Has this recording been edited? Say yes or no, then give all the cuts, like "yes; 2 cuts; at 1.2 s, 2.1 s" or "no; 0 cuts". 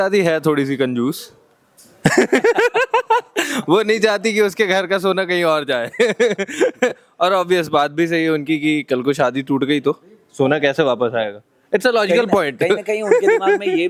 no; 0 cuts